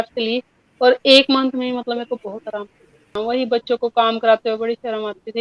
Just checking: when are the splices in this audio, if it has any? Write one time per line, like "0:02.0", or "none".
0:03.2